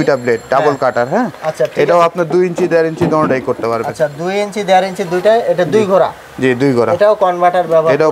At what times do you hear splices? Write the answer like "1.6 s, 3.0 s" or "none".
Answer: none